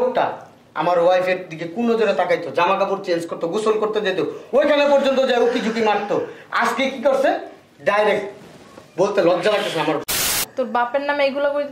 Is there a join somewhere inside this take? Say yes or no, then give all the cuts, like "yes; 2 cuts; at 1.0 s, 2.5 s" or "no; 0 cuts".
yes; 1 cut; at 10.3 s